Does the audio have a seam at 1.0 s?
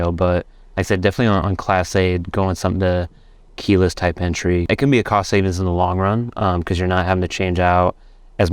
no; 1 cut; at 4.6 s

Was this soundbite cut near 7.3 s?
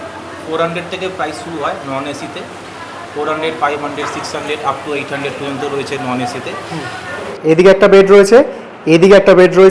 yes; 1 cut; at 7.3 s

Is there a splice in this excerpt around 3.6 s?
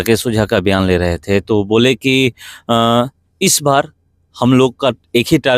no; 0 cuts

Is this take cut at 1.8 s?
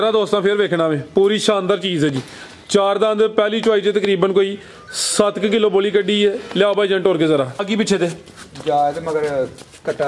no; 1 cut; at 7.6 s

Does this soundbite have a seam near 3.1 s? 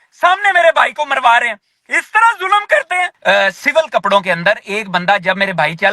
yes; 1 cut; at 3.1 s

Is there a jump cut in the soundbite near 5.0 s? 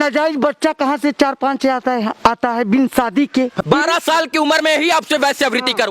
no; 1 cut; at 3.6 s

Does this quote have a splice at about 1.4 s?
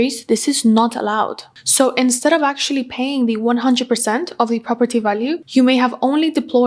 yes; 1 cut; at 1.4 s

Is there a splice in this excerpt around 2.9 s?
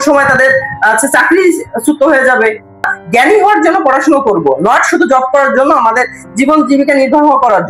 yes; 1 cut; at 2.9 s

